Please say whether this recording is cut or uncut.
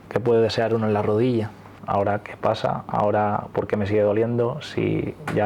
cut